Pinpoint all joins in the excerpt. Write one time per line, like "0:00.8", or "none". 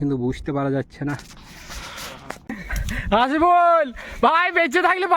0:02.7